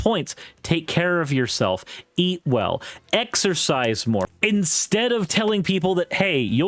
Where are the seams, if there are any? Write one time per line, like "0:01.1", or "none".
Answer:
0:04.3